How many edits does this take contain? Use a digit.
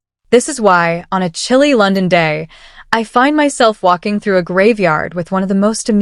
0